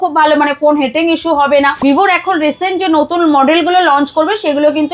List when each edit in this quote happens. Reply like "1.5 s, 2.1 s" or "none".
1.8 s